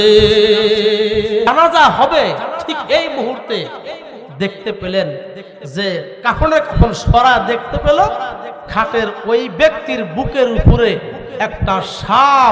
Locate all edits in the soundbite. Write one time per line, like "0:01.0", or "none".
0:01.5